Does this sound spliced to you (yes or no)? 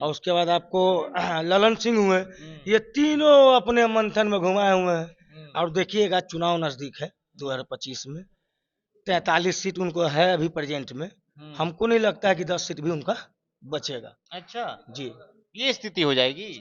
no